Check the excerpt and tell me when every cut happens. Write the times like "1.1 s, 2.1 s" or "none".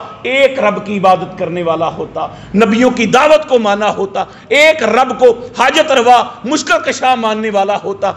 none